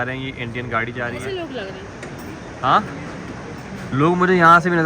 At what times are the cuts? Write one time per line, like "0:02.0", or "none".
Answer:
0:01.2